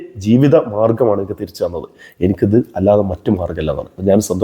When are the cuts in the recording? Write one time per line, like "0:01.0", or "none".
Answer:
none

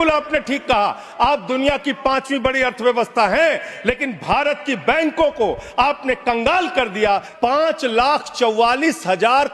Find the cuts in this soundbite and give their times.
0:07.3

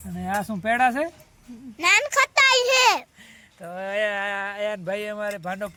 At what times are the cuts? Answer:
none

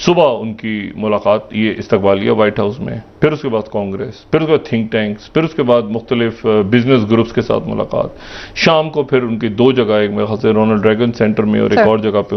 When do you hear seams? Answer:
none

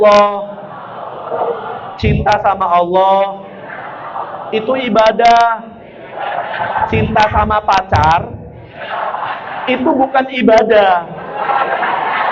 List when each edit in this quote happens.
none

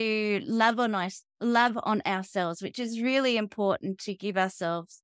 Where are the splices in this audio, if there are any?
none

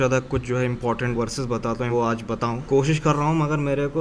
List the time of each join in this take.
none

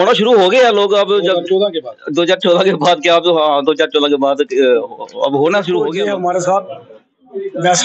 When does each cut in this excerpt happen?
0:05.9

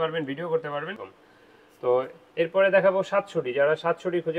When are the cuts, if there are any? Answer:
0:01.1

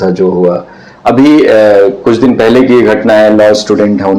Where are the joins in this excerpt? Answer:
none

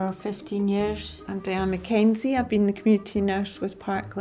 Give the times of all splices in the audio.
0:01.1

